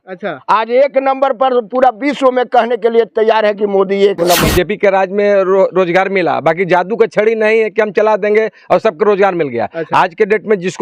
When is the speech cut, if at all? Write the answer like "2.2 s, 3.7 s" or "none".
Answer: 4.5 s